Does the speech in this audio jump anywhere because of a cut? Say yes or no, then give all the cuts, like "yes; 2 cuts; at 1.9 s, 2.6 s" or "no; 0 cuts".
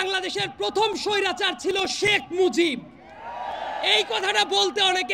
no; 0 cuts